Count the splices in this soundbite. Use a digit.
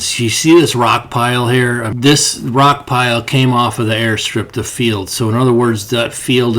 1